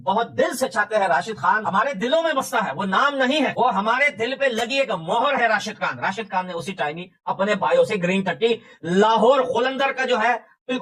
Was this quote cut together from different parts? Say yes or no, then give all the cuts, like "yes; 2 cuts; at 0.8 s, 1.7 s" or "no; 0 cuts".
no; 0 cuts